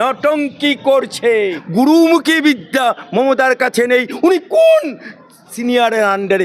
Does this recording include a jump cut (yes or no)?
yes